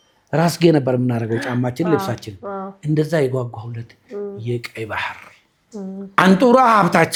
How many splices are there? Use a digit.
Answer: 0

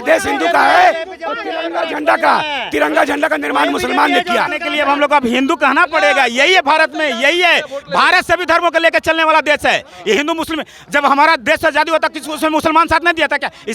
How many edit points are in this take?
1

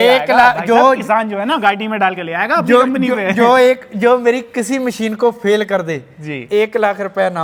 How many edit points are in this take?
0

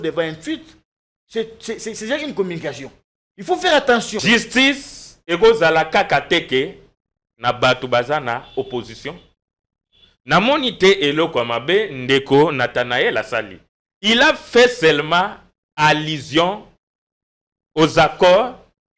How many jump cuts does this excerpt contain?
1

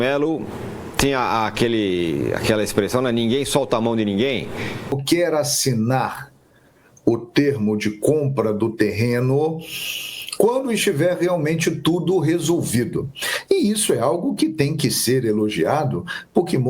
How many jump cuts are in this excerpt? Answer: 1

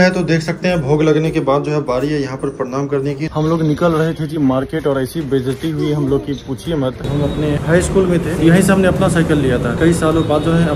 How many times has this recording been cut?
4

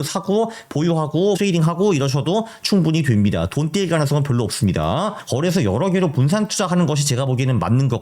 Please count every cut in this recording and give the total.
2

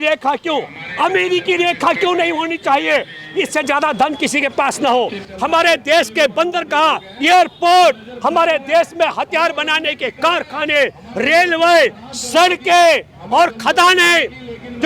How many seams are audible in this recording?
1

